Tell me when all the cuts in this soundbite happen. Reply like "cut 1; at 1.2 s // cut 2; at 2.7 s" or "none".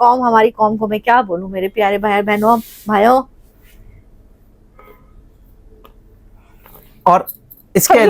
none